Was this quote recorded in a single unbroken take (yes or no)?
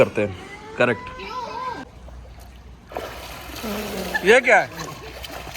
no